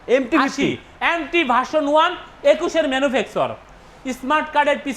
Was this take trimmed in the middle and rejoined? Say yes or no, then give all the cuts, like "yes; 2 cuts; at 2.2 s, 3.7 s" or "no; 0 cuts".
no; 0 cuts